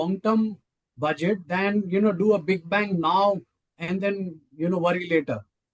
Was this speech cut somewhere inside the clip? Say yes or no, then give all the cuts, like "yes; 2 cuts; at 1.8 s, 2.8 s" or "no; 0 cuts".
no; 0 cuts